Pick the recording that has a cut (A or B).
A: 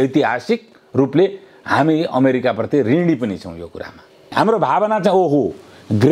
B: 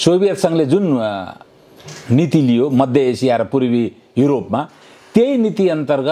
A